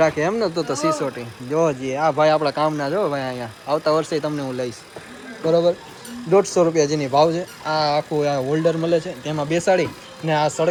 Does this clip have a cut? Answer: no; 0 cuts

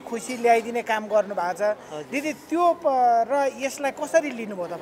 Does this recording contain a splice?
no; 0 cuts

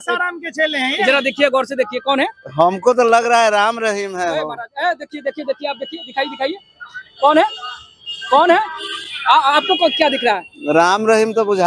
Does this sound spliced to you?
no; 0 cuts

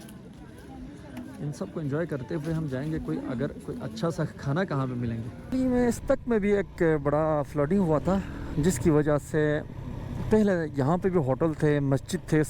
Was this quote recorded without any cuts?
no; 1 cut; at 5.5 s

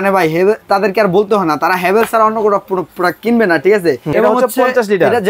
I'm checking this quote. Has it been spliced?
yes; 1 cut; at 4.1 s

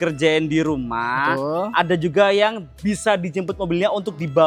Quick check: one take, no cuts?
yes; 0 cuts

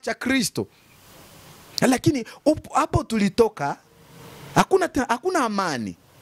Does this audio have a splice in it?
no; 0 cuts

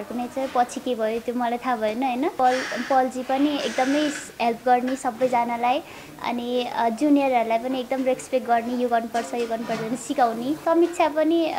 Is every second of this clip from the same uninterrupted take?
no; 2 cuts; at 2.3 s, 10.6 s

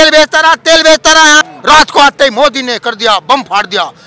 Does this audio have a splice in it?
yes; 1 cut; at 1.5 s

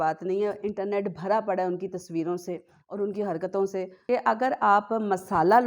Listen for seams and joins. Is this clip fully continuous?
no; 1 cut; at 3.9 s

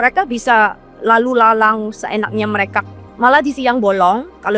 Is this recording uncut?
no; 1 cut; at 3.0 s

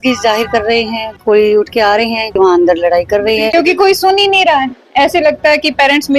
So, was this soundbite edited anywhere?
yes; 3 cuts; at 1.1 s, 2.4 s, 3.5 s

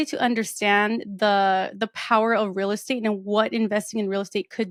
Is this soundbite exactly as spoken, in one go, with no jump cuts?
yes; 0 cuts

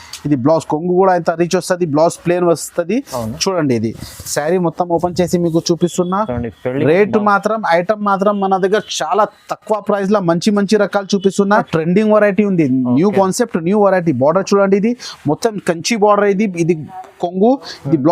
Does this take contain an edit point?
yes; 1 cut; at 11.5 s

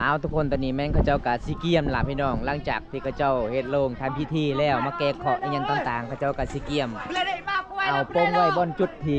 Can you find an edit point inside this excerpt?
no; 0 cuts

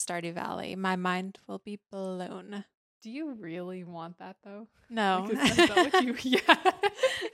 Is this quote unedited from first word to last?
yes; 0 cuts

